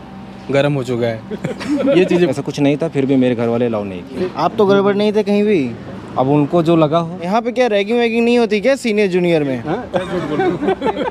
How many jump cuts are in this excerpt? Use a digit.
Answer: 4